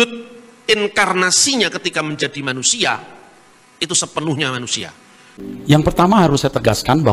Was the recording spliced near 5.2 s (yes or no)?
yes